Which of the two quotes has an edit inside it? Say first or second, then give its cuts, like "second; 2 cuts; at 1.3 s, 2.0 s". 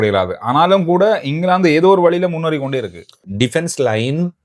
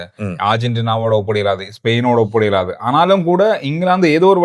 first; 1 cut; at 3.3 s